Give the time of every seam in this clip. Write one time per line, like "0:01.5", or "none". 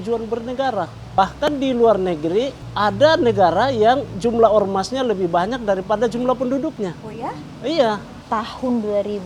0:01.2
0:02.6
0:08.1